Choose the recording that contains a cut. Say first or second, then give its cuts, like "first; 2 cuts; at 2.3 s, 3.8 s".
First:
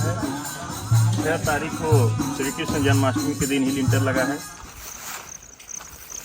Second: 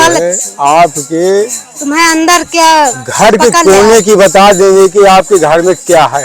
first; 1 cut; at 4.6 s